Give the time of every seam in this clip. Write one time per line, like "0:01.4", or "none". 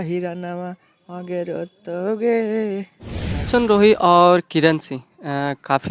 0:03.5